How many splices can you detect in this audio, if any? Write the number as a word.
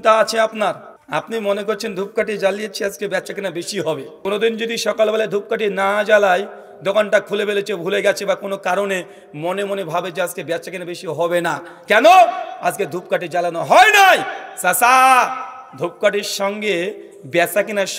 two